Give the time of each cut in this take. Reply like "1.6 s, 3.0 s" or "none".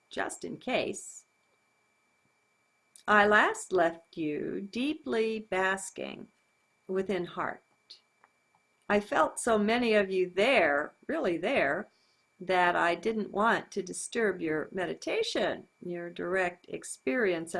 8.8 s

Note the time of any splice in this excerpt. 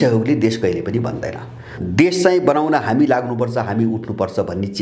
1.7 s

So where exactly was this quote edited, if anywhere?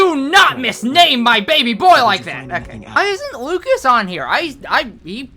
2.9 s

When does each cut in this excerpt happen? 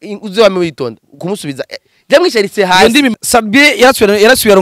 3.1 s

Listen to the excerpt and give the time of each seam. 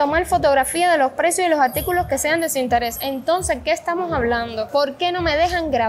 none

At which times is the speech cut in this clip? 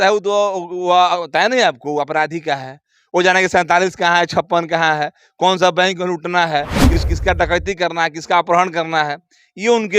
7.0 s

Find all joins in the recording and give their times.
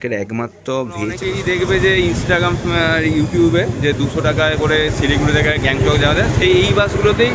1.2 s

